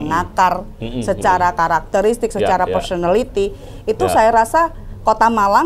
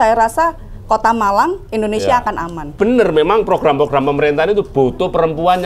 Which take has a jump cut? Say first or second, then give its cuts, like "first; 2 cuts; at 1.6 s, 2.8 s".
second; 1 cut; at 2.7 s